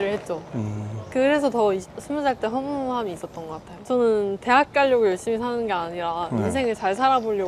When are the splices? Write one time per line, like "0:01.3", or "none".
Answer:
none